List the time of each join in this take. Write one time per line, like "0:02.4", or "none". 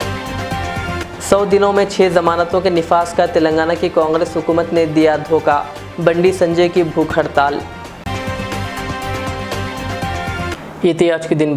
none